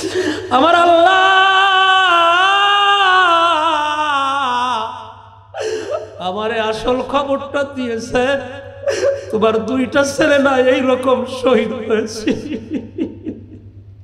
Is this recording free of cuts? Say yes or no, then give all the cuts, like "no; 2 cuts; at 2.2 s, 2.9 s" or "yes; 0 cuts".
yes; 0 cuts